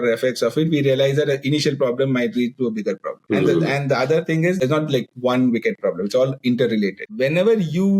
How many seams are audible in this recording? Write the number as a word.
three